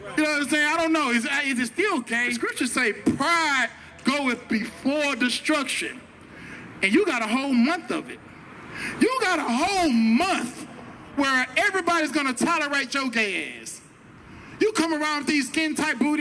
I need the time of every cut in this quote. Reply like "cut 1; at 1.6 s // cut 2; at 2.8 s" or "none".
cut 1; at 2.4 s